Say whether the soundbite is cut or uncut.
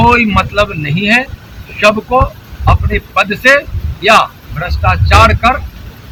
uncut